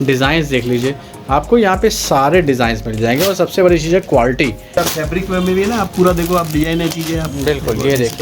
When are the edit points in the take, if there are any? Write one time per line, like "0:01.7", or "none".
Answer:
0:04.8